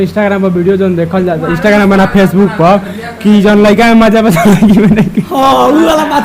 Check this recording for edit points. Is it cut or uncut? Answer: uncut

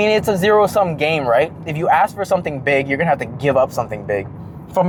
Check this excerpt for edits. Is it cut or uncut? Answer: uncut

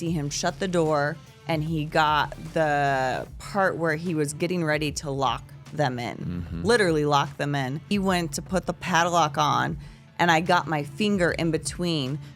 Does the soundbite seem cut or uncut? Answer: cut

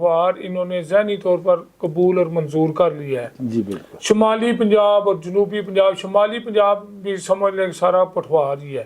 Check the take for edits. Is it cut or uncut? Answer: uncut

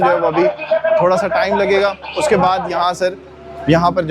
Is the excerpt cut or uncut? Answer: uncut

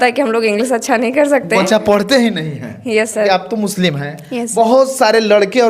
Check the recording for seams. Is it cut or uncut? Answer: cut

